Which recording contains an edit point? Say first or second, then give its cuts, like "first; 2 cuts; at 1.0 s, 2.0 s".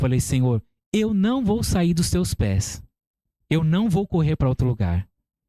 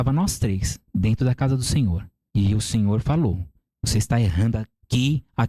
second; 1 cut; at 2.1 s